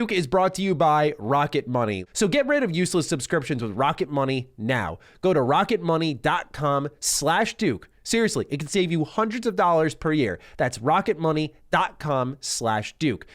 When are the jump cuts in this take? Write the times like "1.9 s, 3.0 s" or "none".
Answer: 2.0 s